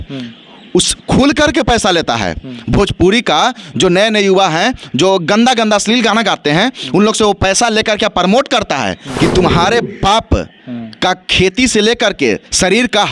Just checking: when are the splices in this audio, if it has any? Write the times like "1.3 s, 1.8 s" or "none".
9.0 s